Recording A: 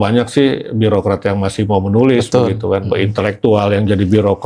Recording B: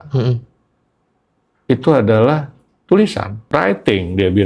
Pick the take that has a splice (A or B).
B